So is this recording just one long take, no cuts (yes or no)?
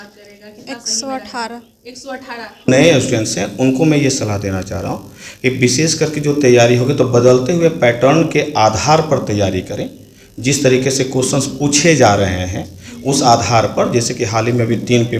no